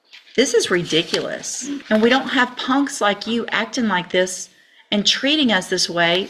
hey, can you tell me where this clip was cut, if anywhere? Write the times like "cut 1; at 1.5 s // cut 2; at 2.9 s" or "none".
cut 1; at 1.8 s